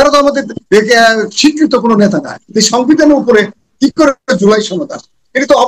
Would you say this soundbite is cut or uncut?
cut